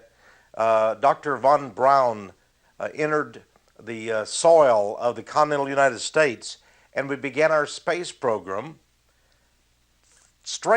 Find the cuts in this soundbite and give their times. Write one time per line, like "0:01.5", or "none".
0:07.2